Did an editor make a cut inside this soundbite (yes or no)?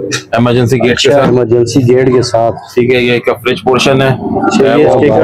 no